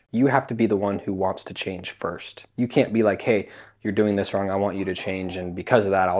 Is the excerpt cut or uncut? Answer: uncut